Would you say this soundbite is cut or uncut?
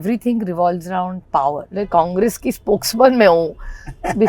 cut